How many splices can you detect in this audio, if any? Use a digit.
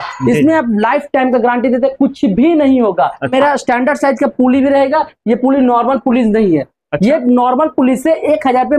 1